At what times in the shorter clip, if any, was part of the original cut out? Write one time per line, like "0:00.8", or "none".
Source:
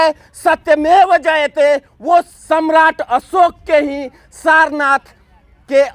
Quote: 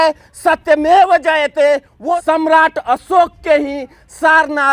0:02.1